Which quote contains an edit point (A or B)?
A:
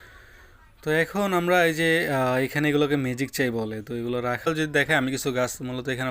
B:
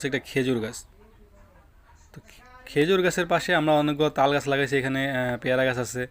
A